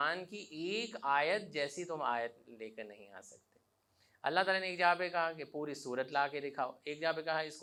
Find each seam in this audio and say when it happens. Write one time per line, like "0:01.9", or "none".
none